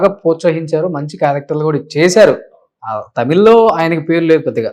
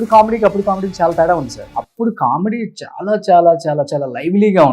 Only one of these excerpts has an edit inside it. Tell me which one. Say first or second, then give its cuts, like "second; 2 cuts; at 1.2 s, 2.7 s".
second; 1 cut; at 1.6 s